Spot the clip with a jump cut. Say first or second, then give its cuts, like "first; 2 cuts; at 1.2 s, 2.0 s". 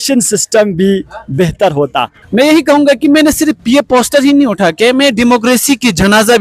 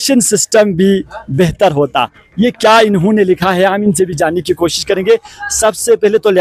first; 1 cut; at 2.2 s